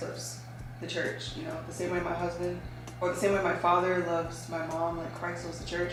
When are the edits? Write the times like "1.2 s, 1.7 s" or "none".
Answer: none